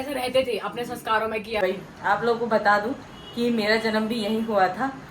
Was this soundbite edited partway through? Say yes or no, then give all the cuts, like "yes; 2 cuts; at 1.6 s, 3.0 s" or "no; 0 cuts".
yes; 1 cut; at 1.6 s